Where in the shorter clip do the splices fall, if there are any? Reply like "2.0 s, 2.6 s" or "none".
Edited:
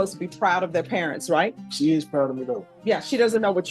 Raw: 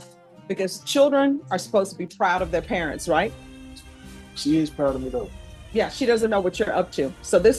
1.6 s, 2.7 s